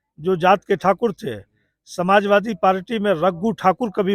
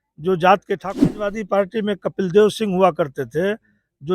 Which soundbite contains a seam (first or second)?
second